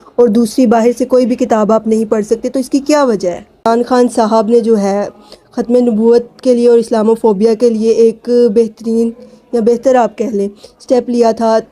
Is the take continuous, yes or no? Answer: no